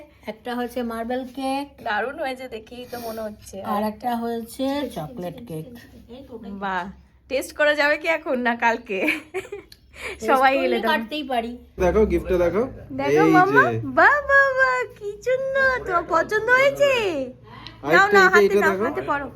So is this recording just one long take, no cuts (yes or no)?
no